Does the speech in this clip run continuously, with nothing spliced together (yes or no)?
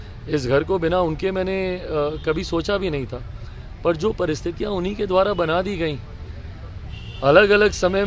yes